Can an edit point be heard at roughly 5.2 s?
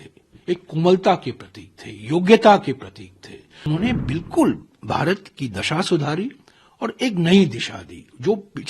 no; 1 cut; at 3.7 s

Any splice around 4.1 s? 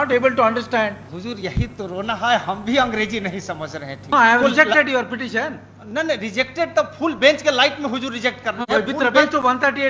yes; 2 cuts; at 1.1 s, 4.1 s

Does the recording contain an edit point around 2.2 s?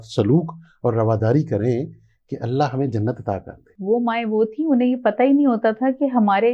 no; 1 cut; at 3.7 s

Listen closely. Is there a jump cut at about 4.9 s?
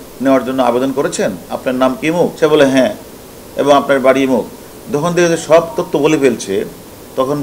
no; 1 cut; at 2.3 s

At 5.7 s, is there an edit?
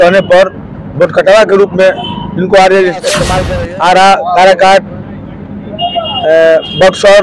no; 1 cut; at 3.4 s

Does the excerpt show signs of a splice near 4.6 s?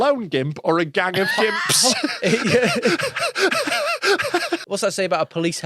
yes; 1 cut; at 4.6 s

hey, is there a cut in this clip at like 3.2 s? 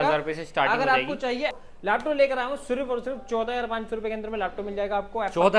no; 1 cut; at 1.6 s

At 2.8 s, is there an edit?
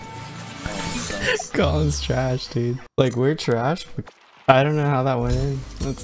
yes; 2 cuts; at 2.8 s, 3.9 s

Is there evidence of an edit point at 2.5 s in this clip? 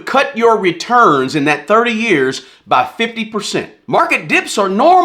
no; 1 cut; at 3.8 s

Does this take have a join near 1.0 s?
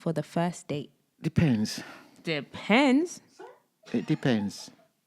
yes; 1 cut; at 1.0 s

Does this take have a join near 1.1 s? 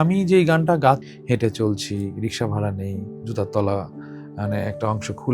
yes; 1 cut; at 1.1 s

